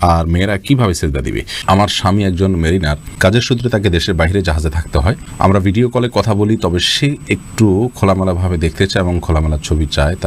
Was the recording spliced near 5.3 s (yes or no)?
yes